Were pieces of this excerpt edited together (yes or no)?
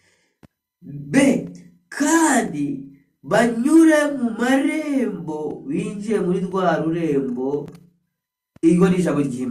no